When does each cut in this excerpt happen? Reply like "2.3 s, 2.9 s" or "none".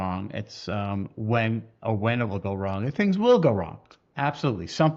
none